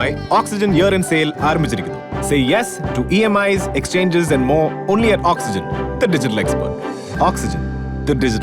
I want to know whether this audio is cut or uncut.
uncut